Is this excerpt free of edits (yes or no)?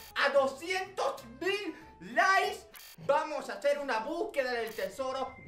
yes